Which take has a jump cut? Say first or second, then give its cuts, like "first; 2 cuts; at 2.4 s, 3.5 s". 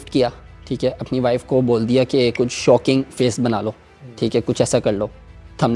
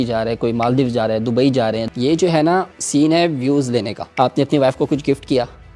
second; 3 cuts; at 1.9 s, 2.8 s, 4.0 s